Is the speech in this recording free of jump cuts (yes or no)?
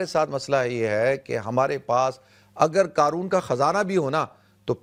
yes